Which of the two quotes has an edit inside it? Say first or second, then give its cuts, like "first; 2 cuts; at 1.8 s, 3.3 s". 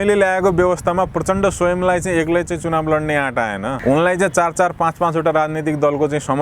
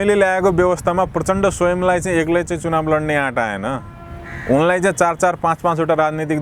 first; 1 cut; at 3.7 s